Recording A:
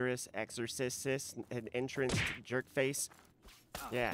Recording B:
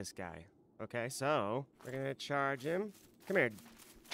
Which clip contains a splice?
B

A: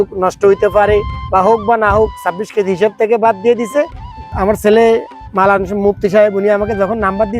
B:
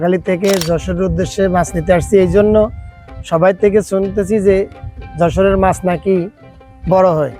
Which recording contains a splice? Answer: A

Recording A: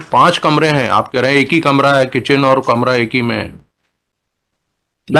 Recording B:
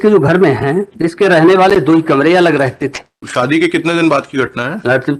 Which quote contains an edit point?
B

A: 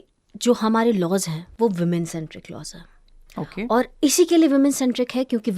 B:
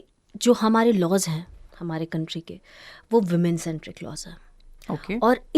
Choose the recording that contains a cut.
A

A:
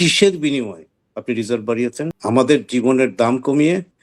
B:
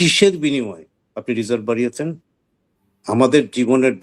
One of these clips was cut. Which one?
A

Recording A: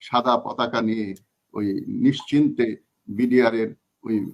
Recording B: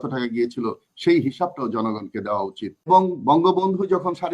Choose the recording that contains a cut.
B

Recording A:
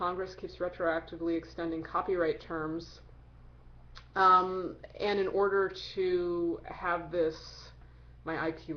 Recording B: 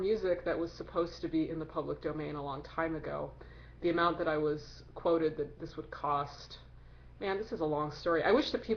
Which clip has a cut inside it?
B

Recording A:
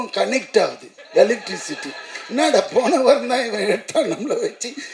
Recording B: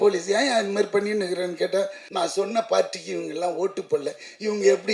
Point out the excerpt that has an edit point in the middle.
B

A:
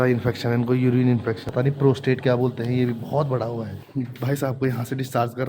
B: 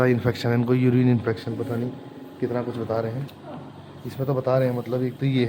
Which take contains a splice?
A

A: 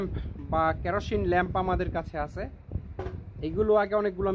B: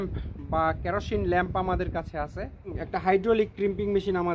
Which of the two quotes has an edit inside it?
B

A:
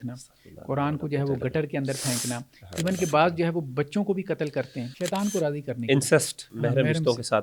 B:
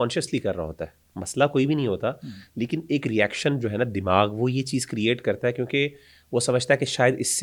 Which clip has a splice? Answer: A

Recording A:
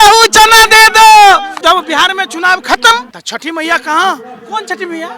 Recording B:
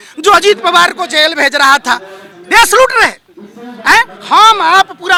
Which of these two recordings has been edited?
A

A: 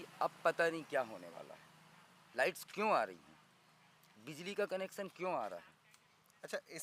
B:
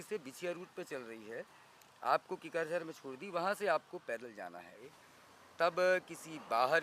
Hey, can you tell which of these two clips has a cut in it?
B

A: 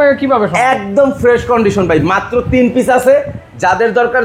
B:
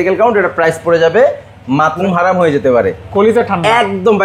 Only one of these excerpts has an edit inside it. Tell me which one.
B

